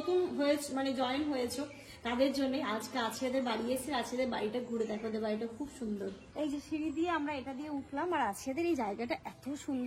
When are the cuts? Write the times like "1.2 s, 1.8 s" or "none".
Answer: 6.2 s